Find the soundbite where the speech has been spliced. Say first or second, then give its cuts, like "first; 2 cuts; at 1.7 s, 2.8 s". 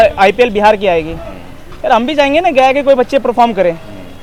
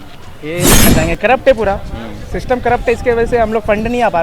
second; 1 cut; at 0.9 s